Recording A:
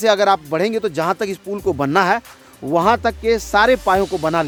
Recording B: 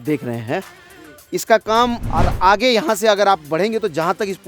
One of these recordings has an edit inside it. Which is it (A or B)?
B